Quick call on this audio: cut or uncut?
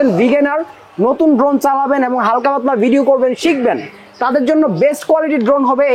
uncut